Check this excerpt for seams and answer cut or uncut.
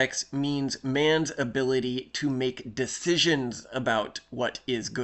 uncut